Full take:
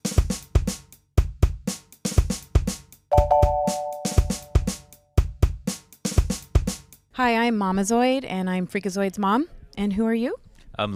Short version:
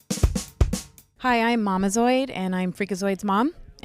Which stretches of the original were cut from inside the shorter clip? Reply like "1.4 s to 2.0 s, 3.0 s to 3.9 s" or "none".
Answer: 2.9 s to 6.9 s